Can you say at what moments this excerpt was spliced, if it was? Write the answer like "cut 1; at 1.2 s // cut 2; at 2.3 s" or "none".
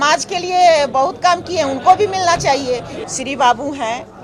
cut 1; at 2.9 s